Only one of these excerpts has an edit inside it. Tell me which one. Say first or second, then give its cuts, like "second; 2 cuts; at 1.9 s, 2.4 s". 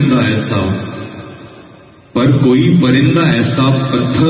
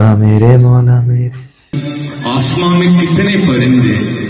second; 1 cut; at 1.8 s